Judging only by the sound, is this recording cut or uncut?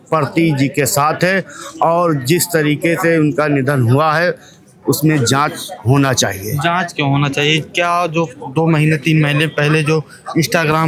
uncut